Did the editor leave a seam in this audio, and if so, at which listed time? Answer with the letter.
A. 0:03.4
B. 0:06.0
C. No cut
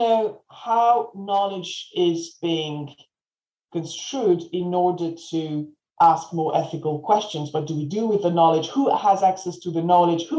C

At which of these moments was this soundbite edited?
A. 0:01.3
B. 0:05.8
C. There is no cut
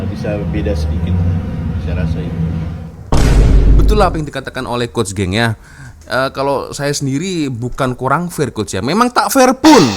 C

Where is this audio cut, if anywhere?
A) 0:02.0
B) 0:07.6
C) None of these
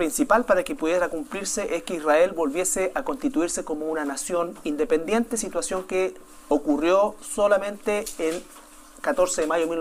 C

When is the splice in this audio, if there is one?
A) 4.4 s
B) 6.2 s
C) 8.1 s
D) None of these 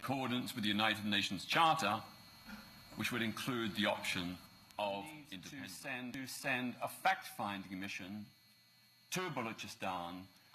B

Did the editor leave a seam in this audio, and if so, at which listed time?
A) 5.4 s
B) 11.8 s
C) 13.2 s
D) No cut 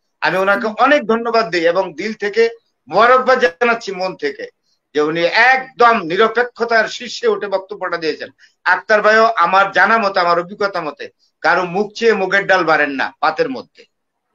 D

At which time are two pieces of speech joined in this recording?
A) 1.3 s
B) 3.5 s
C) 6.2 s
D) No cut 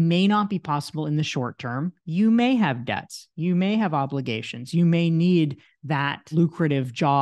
C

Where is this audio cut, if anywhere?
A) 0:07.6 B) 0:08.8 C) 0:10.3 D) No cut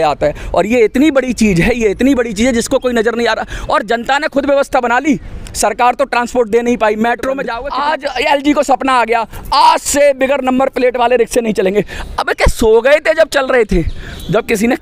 A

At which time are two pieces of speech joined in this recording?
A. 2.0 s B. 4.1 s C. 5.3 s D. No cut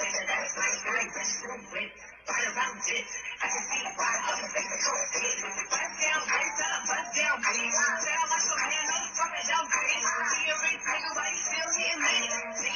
D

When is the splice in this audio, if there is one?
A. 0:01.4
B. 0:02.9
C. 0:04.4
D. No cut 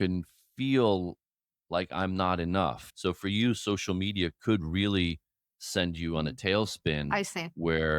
B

